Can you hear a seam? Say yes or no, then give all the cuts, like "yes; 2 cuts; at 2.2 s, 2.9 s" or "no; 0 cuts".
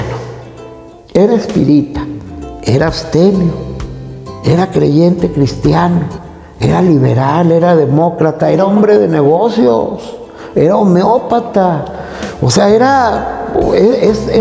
no; 0 cuts